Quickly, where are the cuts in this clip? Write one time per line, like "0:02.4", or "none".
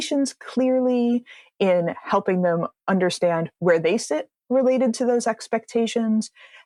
none

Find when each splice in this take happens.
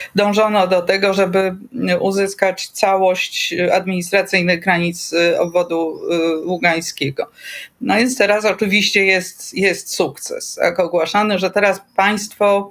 none

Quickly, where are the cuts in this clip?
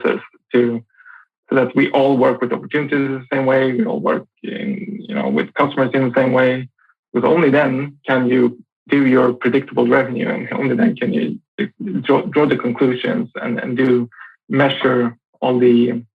0:08.7

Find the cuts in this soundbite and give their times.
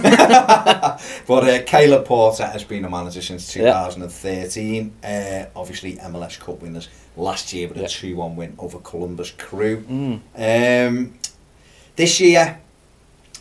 none

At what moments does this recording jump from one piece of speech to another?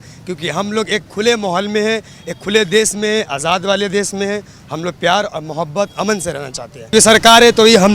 0:06.9

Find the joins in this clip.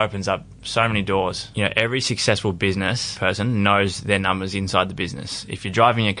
0:01.4
0:03.1

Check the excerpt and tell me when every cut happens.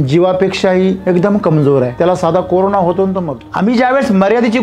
0:01.0
0:01.9
0:03.4

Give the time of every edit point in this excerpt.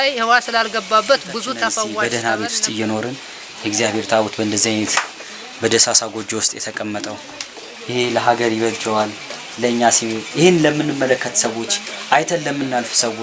0:01.9

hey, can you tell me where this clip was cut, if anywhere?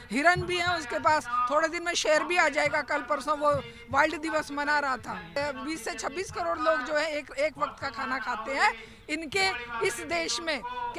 0:05.4

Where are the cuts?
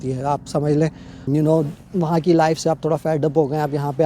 0:01.3

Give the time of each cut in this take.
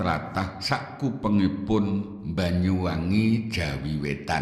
none

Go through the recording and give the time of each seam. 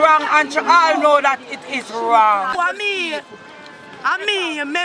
0:02.5

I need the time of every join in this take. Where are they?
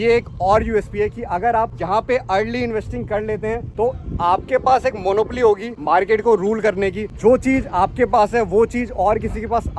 0:01.8
0:03.7
0:05.7
0:07.1

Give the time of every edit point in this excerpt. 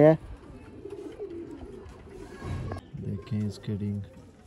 0:02.8

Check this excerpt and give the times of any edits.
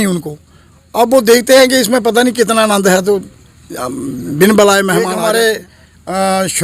0:05.2

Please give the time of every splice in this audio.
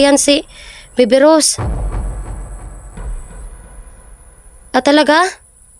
0:01.6
0:04.5

